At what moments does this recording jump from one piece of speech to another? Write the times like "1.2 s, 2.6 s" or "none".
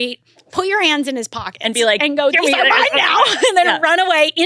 none

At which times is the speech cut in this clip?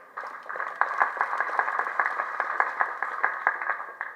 none

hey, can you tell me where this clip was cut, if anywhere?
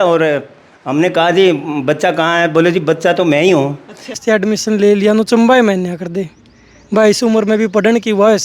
4.2 s

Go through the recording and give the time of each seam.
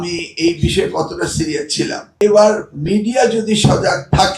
2.0 s

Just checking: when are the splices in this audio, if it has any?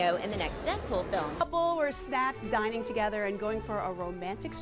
1.4 s

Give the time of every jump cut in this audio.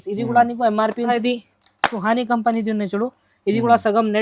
1.1 s

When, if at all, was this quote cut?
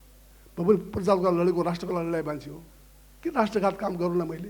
none

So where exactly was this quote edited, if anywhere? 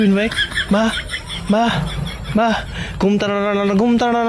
none

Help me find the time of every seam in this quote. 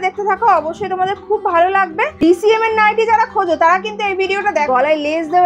2.2 s, 4.7 s

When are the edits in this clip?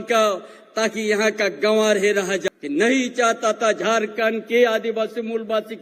2.5 s

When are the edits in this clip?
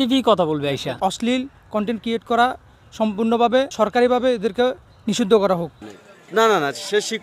1.0 s, 5.7 s

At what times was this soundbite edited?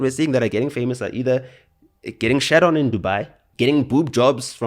3.4 s

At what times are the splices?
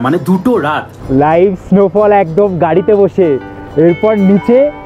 0.9 s

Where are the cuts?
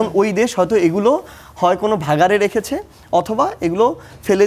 none

